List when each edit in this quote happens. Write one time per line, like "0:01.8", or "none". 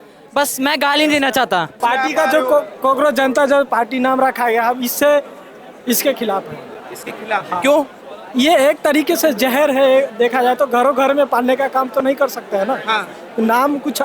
0:01.7